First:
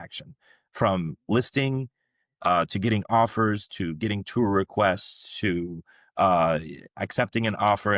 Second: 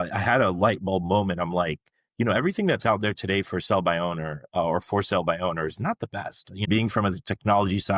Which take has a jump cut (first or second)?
second